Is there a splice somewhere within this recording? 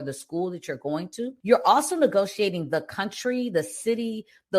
yes; 1 cut; at 1.4 s

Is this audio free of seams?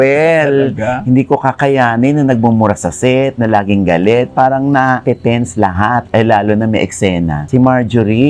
no; 1 cut; at 7.4 s

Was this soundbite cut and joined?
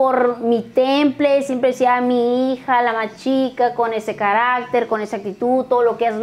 no; 0 cuts

